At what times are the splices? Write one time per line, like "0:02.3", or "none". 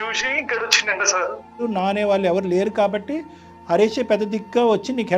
0:01.6